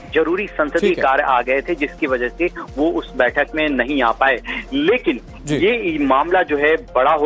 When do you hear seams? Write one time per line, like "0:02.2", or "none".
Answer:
0:03.7

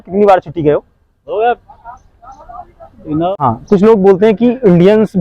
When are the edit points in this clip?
0:03.3

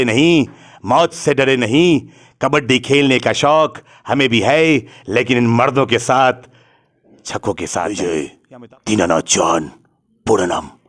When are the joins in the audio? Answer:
0:07.9

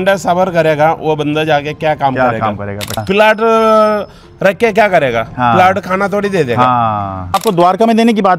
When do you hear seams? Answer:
0:03.0
0:07.4

